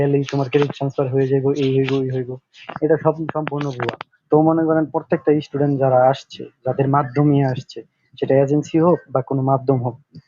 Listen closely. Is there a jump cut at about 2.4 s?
no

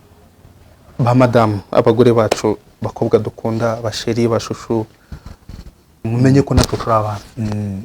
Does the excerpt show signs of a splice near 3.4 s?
no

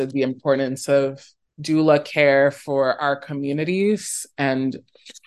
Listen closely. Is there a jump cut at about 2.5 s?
no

